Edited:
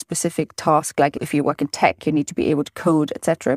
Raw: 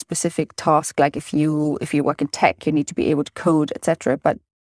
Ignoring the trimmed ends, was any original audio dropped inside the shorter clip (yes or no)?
yes